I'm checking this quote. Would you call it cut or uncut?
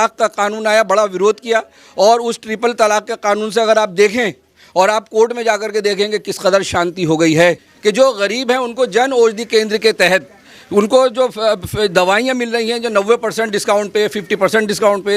cut